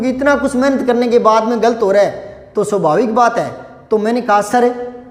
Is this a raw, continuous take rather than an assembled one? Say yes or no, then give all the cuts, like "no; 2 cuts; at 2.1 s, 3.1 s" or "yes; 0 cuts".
yes; 0 cuts